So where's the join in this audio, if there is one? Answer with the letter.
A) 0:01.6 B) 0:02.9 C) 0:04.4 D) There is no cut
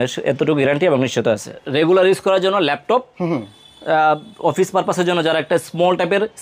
A